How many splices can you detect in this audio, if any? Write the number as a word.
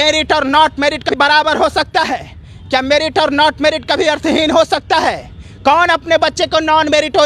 one